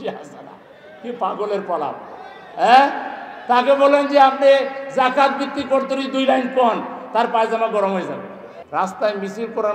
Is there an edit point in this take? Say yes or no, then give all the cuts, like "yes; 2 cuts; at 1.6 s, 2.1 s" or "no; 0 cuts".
yes; 1 cut; at 8.5 s